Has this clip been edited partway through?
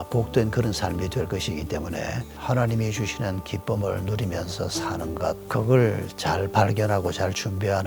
yes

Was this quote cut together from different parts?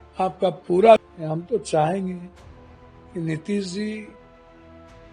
yes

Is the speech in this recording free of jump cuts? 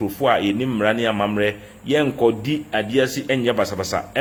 yes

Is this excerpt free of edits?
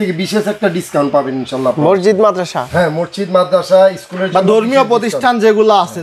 yes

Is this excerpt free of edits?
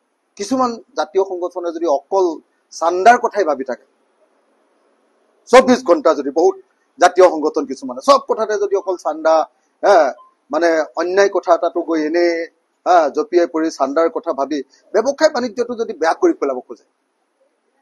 yes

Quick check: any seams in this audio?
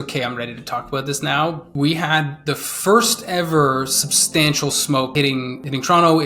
yes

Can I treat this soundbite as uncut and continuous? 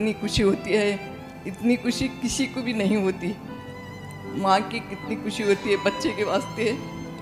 yes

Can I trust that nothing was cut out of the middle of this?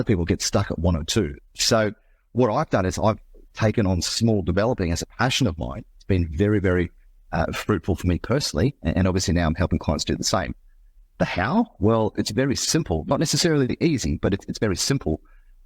no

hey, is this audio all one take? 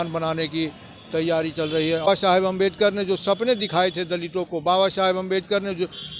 no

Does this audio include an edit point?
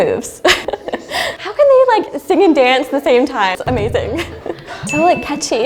yes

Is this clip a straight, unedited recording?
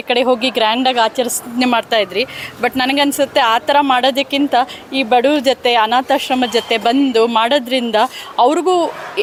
yes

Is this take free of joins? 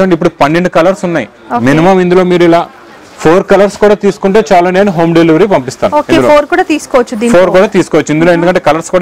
yes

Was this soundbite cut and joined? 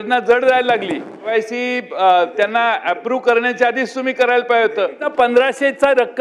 yes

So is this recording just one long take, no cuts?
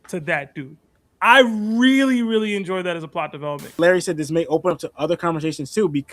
no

